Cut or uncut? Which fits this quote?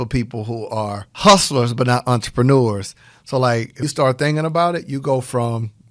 cut